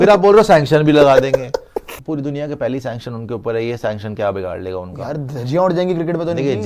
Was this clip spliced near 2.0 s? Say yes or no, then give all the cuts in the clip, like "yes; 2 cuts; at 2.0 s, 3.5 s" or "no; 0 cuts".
yes; 1 cut; at 2.0 s